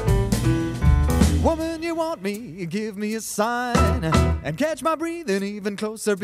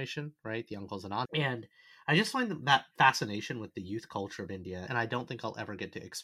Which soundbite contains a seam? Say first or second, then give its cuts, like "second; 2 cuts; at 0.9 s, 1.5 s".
second; 2 cuts; at 1.3 s, 4.9 s